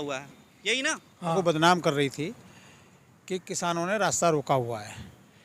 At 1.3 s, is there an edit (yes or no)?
yes